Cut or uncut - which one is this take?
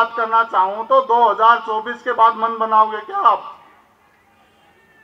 uncut